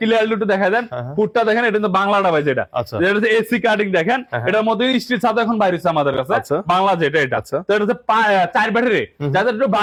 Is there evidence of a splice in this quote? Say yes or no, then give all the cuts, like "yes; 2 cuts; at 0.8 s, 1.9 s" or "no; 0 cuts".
no; 0 cuts